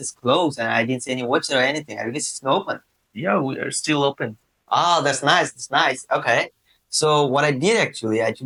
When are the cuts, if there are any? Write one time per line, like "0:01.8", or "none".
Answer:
none